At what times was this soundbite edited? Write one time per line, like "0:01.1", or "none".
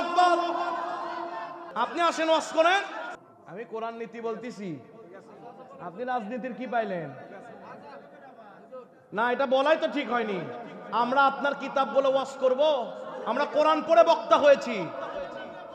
0:01.6
0:03.0